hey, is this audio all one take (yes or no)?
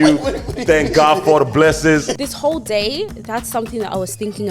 no